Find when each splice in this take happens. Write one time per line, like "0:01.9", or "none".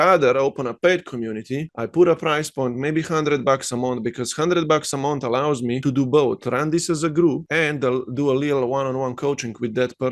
0:05.8
0:07.4